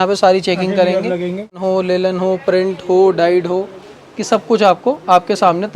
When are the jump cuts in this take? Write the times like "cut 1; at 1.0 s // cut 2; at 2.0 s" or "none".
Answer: cut 1; at 1.5 s